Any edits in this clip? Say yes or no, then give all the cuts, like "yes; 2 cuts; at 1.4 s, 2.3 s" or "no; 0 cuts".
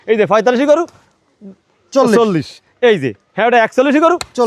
no; 0 cuts